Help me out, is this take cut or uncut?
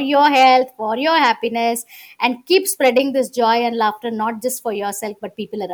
uncut